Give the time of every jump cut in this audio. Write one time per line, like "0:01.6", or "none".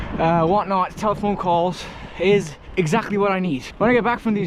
0:02.6
0:03.7

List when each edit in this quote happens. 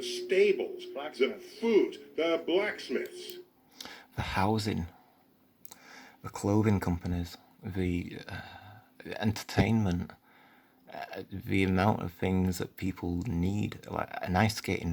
none

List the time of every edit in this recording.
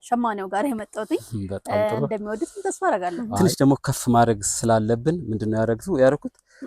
0:03.2

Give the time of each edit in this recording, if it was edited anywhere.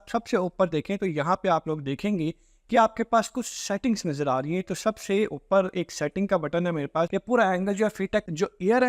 0:07.1

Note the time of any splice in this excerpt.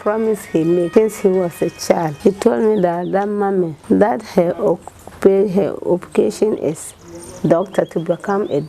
0:00.9
0:02.1
0:03.8

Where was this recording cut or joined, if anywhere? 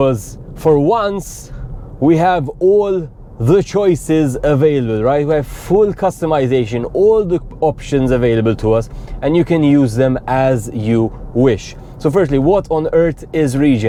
none

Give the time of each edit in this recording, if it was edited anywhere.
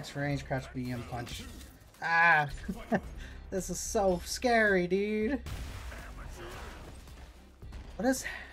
0:05.5

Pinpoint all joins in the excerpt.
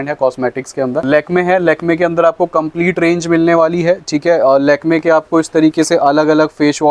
0:01.1

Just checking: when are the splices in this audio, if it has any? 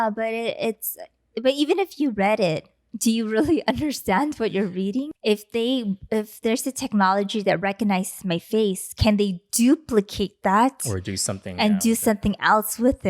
0:05.1

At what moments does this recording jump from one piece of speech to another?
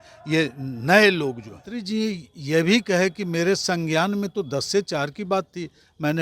0:01.8

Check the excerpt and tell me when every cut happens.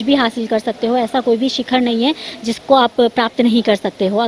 none

